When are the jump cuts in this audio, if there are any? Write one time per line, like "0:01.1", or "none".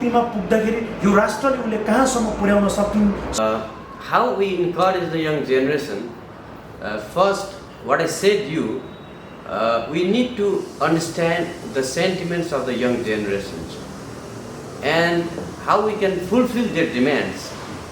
0:03.4